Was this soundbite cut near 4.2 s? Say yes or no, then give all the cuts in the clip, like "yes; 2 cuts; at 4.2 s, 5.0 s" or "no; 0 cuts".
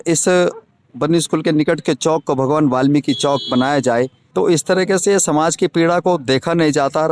yes; 1 cut; at 4.2 s